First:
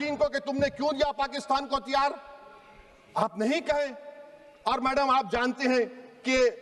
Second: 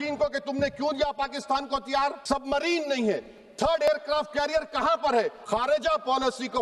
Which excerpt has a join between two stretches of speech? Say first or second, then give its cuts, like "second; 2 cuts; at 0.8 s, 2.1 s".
second; 2 cuts; at 2.2 s, 5.4 s